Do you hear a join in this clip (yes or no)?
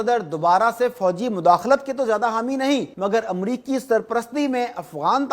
yes